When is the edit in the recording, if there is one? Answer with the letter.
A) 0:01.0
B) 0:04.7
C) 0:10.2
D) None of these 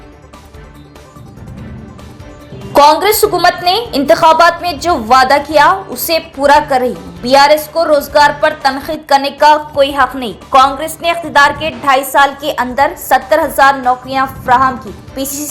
A